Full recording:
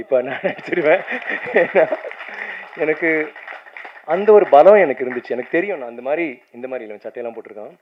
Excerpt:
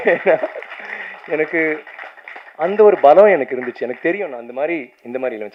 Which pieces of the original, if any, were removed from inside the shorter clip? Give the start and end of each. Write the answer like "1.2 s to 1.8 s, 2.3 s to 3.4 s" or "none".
none